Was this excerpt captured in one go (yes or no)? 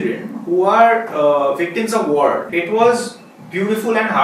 no